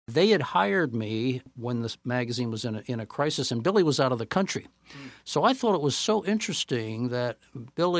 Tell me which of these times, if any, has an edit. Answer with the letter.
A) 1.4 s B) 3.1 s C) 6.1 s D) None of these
A